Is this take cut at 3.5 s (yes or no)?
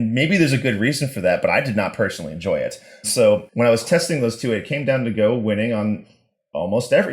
yes